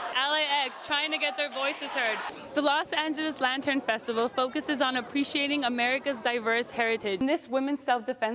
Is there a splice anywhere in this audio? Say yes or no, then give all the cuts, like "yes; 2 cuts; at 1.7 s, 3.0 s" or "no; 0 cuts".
yes; 2 cuts; at 2.3 s, 7.2 s